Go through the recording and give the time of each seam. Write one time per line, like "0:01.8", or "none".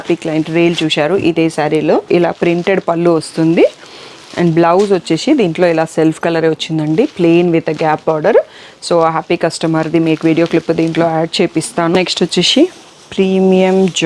0:02.1
0:12.0